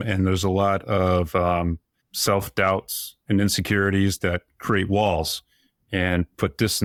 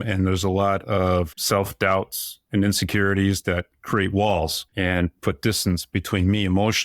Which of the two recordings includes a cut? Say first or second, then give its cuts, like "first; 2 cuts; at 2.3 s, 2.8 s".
second; 2 cuts; at 1.3 s, 4.6 s